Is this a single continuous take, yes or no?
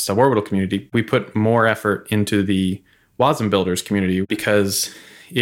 no